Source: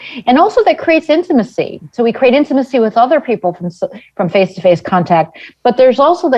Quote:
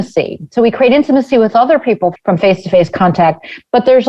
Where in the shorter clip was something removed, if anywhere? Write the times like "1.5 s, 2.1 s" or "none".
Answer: 2.2 s